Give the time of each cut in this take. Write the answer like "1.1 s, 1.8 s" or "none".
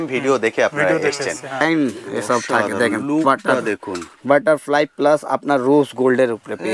1.6 s